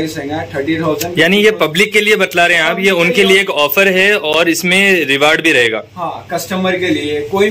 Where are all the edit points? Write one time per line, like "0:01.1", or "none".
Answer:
none